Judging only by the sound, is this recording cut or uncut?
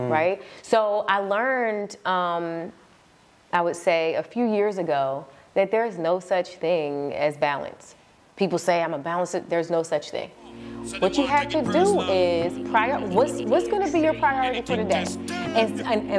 uncut